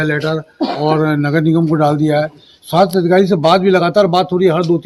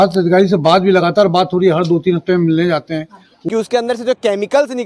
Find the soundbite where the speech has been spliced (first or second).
second